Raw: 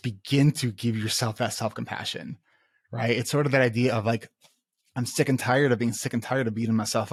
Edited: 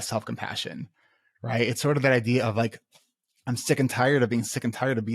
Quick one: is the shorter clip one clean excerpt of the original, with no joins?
yes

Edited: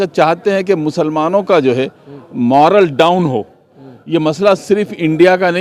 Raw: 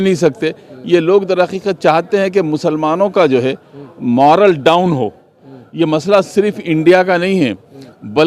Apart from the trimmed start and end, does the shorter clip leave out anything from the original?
no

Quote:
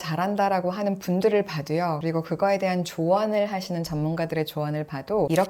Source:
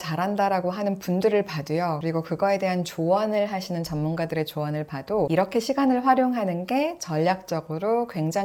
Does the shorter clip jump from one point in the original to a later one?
no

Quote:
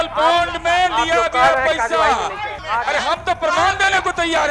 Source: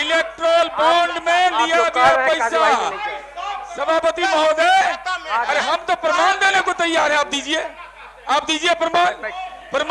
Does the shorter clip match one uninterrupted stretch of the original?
no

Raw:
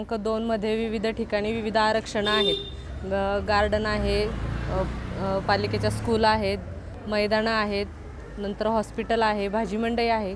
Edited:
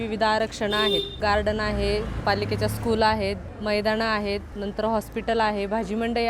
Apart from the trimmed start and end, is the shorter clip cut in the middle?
yes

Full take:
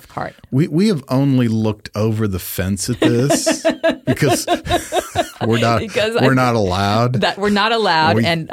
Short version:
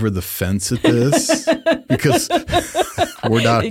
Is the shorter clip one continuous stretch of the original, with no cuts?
yes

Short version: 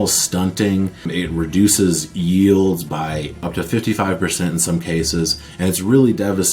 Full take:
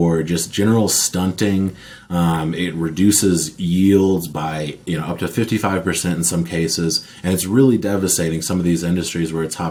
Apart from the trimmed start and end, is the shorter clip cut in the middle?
yes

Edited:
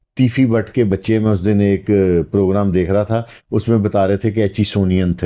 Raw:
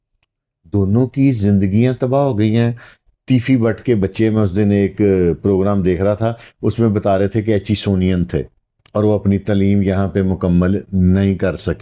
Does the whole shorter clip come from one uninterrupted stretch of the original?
yes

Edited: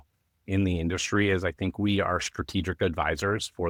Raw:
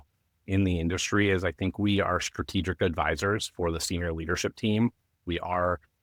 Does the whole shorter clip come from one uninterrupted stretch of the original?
yes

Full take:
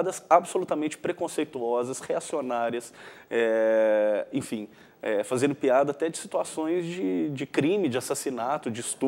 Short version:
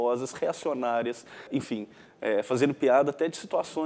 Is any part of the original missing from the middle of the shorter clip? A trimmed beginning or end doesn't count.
yes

